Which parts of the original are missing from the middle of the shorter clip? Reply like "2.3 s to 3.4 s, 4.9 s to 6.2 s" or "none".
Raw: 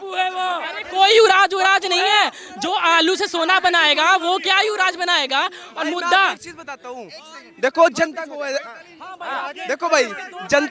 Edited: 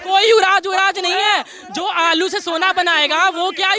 none